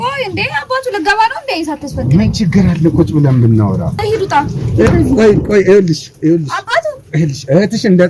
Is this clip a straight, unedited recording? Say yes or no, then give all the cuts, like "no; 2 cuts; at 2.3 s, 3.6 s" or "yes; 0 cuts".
no; 1 cut; at 3.9 s